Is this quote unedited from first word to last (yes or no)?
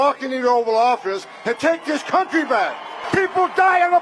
no